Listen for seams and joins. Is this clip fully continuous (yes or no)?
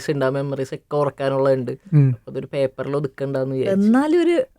yes